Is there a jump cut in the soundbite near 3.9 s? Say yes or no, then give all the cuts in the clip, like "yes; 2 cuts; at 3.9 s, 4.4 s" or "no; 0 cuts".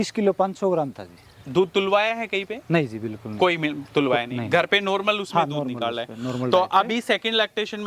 no; 0 cuts